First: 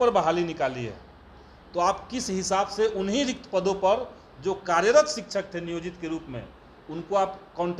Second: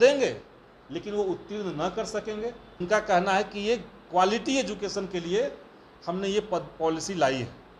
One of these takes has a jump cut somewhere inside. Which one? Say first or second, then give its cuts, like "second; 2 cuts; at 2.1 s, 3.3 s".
second; 1 cut; at 2.7 s